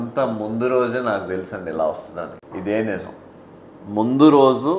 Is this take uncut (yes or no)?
no